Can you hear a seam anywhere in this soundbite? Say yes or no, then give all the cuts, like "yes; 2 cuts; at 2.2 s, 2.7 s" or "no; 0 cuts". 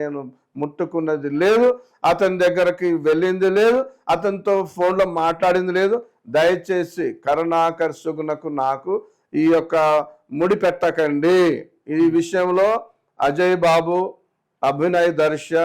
no; 0 cuts